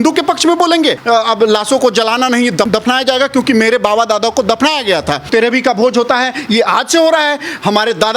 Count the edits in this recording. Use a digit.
2